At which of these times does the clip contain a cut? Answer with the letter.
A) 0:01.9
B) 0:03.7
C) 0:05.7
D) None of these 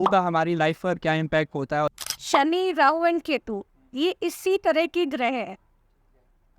A